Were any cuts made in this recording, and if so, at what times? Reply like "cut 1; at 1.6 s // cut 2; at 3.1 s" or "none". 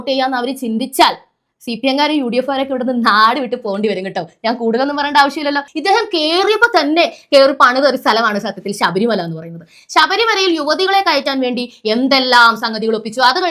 cut 1; at 5.6 s